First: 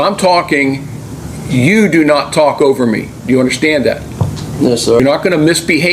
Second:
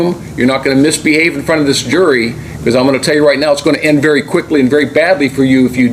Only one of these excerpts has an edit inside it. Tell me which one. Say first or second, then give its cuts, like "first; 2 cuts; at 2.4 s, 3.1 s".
first; 1 cut; at 5.0 s